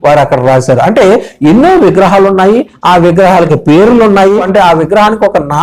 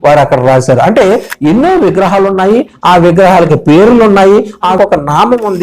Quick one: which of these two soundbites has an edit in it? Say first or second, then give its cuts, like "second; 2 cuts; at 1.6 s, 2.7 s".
second; 1 cut; at 4.5 s